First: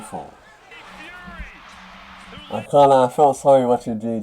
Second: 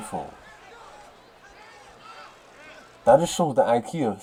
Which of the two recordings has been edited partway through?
first; 1 cut; at 1.1 s

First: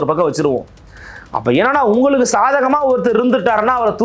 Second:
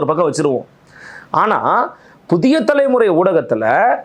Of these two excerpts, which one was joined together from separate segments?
first; 1 cut; at 1.2 s

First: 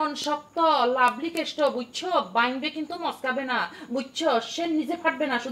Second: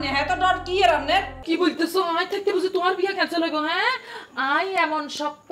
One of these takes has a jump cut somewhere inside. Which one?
second; 1 cut; at 1.4 s

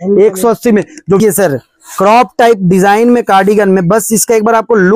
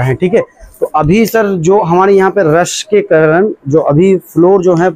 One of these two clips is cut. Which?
first; 1 cut; at 1.2 s

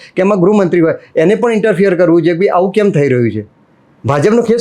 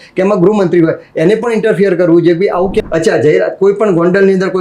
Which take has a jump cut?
second; 1 cut; at 2.8 s

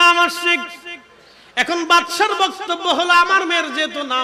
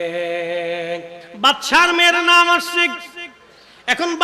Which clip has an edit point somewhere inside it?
second; 1 cut; at 1.2 s

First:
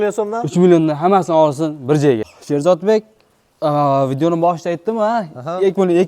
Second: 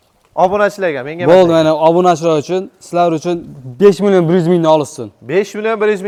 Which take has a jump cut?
first; 1 cut; at 2.3 s

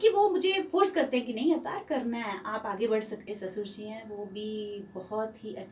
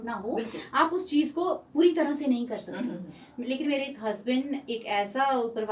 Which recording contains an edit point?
first; 1 cut; at 3.3 s

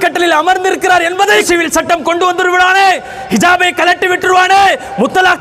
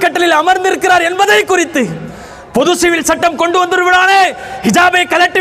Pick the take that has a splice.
first; 1 cut; at 1.4 s

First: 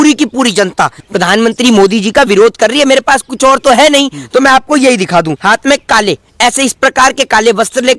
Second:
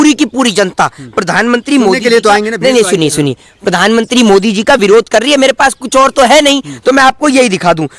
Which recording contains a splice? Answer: first; 2 cuts; at 1.0 s, 5.6 s

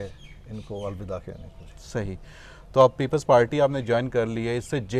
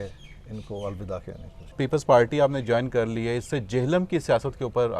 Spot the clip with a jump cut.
second; 1 cut; at 1.8 s

